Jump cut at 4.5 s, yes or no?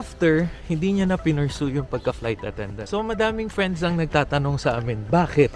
no